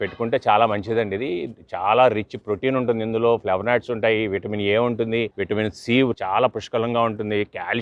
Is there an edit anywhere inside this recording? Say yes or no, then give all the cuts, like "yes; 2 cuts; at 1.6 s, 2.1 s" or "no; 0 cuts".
yes; 2 cuts; at 5.4 s, 6.2 s